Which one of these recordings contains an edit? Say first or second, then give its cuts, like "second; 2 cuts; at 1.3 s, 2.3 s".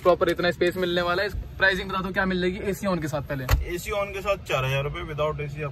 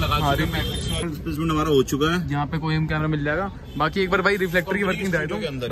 second; 1 cut; at 1.0 s